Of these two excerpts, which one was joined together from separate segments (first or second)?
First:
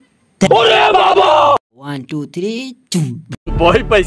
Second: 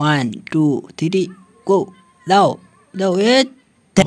first